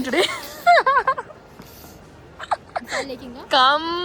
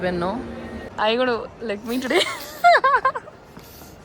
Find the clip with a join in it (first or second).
second